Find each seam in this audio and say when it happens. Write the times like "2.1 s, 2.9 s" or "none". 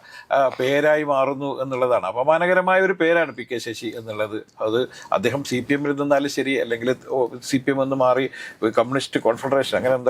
none